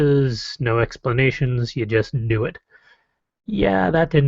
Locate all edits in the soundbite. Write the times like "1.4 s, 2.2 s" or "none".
1.4 s